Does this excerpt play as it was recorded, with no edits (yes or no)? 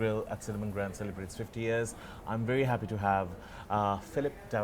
yes